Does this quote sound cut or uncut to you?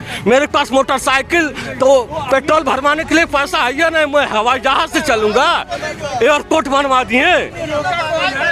uncut